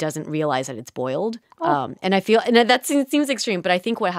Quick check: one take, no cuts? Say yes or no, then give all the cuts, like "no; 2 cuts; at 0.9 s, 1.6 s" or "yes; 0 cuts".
yes; 0 cuts